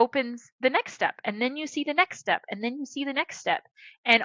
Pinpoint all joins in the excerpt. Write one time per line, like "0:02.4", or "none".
none